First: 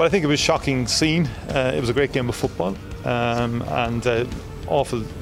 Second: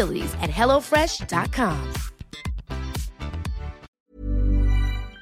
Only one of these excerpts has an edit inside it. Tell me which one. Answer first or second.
second